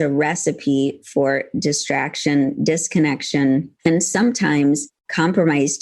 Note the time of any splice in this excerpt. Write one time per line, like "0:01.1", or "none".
0:03.7

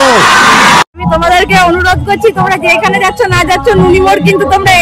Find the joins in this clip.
0:01.0

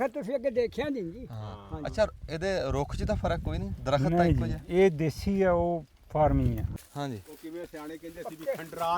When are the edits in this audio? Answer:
0:06.7

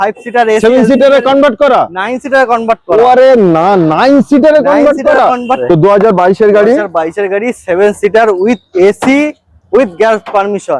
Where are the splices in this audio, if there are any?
0:05.6

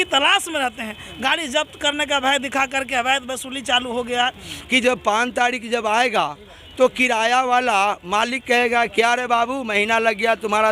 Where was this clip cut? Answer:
0:04.5

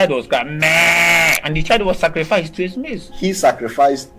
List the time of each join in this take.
0:01.4
0:03.0

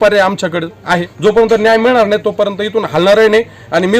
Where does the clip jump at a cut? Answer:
0:01.1

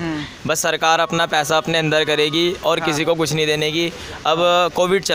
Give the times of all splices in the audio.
none

